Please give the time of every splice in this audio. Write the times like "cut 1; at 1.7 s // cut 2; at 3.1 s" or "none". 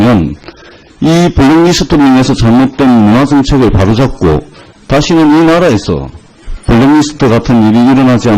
cut 1; at 1.6 s

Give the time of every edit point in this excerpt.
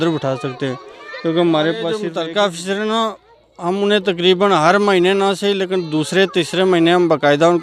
cut 1; at 2.0 s

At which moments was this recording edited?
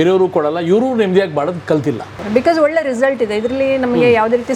cut 1; at 2.1 s

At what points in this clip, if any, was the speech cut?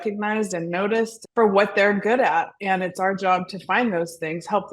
cut 1; at 1.2 s

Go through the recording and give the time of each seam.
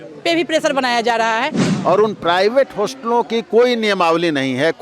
cut 1; at 1.7 s

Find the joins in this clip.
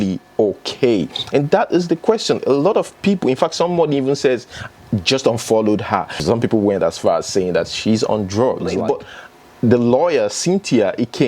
cut 1; at 6.2 s // cut 2; at 8.8 s

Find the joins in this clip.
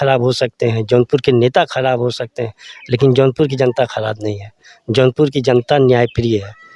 none

